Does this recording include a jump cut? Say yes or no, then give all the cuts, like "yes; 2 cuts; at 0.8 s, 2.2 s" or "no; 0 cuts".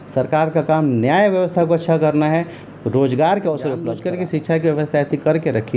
yes; 1 cut; at 4.0 s